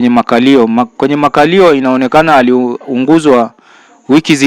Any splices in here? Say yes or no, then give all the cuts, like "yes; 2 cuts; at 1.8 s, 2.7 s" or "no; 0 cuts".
no; 0 cuts